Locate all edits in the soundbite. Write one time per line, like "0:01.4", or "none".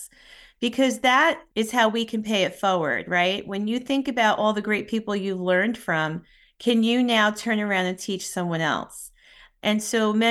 0:01.4